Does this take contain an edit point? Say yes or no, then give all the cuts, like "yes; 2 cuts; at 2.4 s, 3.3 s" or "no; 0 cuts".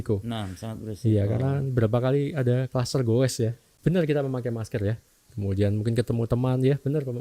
yes; 1 cut; at 3.7 s